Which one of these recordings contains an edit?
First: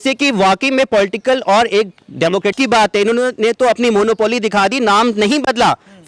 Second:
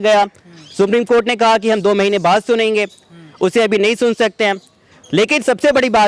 first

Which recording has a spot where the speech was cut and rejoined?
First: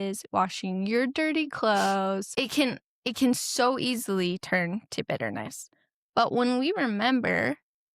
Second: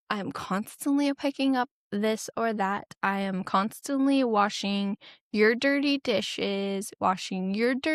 first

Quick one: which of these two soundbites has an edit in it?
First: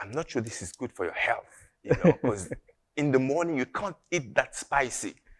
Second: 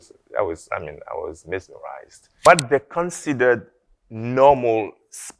second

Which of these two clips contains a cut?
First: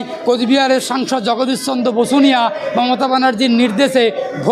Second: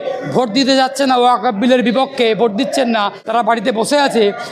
second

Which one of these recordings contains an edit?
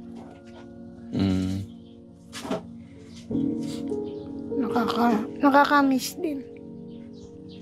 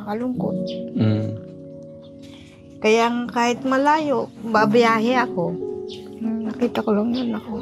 first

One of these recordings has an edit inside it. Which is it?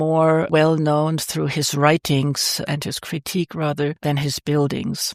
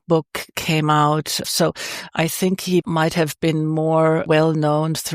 second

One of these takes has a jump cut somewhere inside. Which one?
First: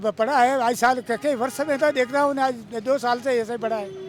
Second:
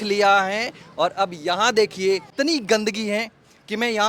second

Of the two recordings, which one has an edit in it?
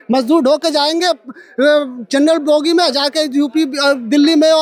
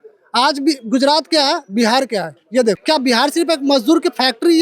second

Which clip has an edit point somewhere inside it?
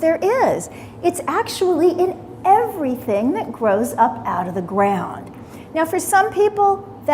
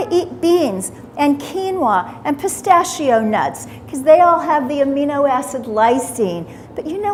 first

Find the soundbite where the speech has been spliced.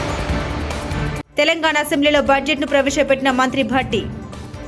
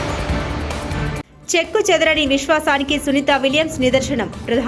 second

